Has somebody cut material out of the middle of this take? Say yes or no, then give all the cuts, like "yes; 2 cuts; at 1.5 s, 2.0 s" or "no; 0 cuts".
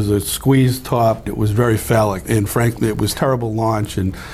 yes; 2 cuts; at 1.3 s, 3.1 s